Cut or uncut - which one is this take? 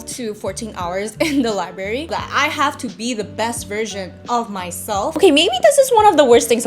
cut